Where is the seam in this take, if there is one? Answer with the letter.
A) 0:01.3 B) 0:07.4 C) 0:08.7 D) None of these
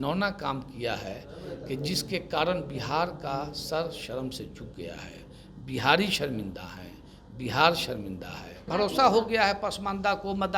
C